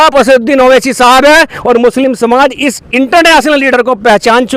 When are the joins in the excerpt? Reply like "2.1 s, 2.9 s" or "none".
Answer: none